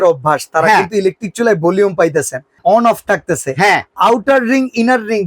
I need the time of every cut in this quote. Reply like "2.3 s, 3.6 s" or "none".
2.4 s